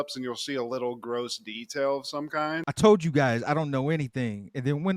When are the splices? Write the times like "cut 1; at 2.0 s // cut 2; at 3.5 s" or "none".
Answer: cut 1; at 2.7 s